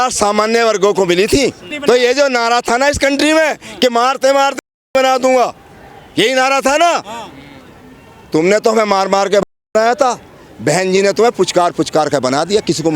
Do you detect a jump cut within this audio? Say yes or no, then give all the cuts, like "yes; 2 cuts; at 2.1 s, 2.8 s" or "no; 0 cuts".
yes; 1 cut; at 1.7 s